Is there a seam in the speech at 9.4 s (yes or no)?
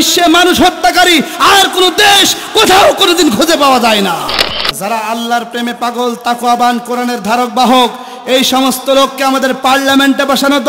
no